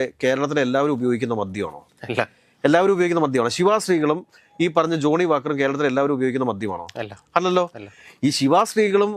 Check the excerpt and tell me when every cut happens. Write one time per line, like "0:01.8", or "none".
none